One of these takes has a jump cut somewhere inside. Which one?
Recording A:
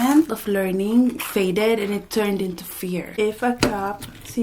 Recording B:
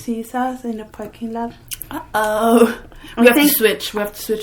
A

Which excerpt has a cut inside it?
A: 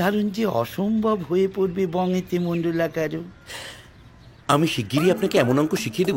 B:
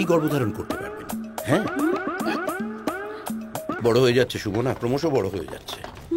B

